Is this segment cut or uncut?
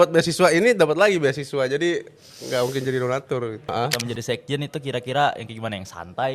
cut